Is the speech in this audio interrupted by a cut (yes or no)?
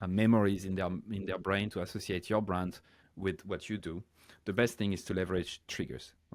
no